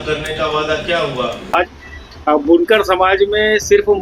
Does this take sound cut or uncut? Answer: cut